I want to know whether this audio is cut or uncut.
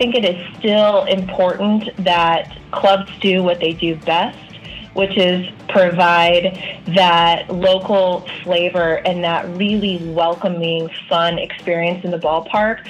uncut